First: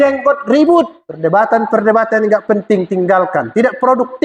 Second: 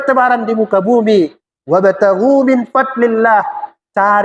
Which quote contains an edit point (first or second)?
first